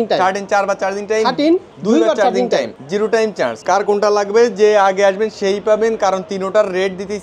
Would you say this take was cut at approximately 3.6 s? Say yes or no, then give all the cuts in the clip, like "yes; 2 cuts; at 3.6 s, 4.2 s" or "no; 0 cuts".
yes; 2 cuts; at 1.7 s, 3.6 s